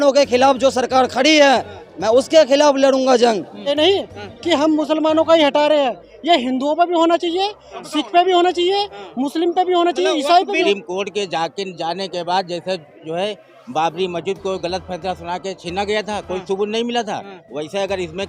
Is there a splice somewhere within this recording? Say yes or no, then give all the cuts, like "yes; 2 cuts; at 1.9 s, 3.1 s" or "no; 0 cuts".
yes; 2 cuts; at 3.7 s, 10.6 s